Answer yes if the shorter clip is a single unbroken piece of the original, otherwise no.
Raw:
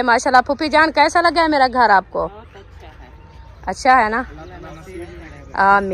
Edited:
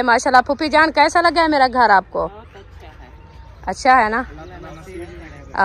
yes